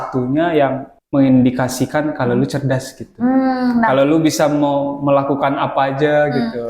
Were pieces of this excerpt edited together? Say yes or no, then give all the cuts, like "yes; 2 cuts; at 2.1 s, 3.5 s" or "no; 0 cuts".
yes; 1 cut; at 0.9 s